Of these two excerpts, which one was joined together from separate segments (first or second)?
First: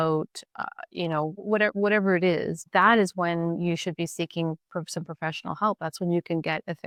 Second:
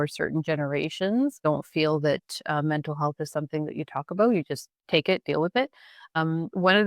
second